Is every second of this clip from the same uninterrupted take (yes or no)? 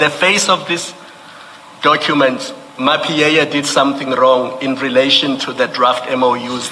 yes